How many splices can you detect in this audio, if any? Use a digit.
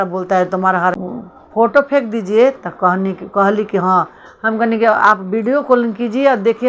1